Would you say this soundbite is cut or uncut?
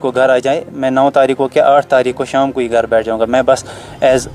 uncut